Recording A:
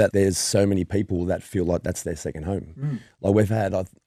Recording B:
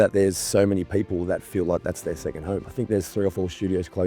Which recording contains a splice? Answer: B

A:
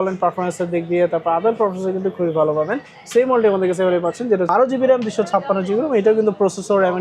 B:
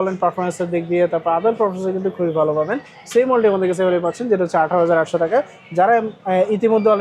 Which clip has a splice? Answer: A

